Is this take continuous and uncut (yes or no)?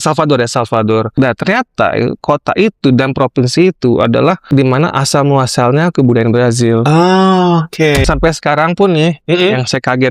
no